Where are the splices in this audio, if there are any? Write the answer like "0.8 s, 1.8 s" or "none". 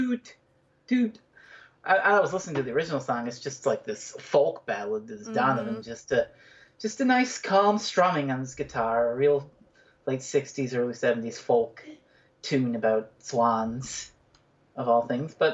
none